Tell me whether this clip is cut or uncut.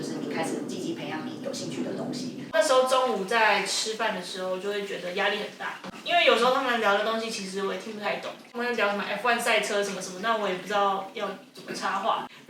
cut